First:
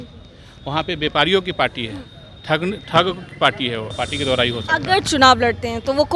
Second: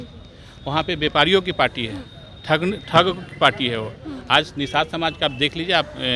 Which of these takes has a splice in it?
first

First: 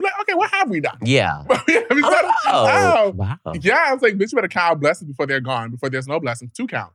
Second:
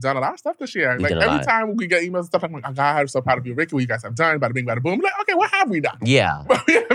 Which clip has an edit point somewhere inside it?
first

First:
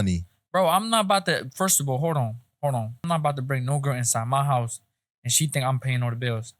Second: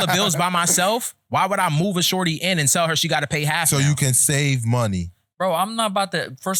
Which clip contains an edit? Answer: first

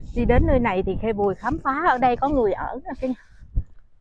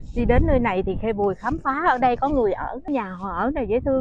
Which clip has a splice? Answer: second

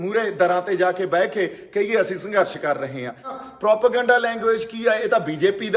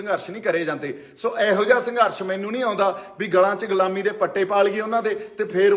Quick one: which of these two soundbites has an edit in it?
first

